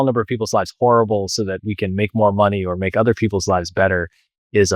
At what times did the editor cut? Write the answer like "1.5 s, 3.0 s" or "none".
none